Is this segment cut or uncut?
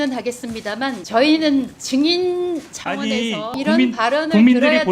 cut